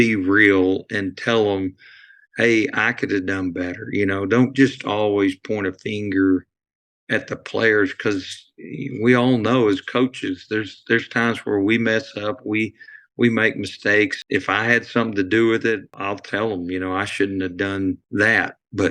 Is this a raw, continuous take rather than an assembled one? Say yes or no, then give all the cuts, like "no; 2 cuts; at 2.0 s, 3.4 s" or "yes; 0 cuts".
no; 3 cuts; at 14.2 s, 15.9 s, 18.0 s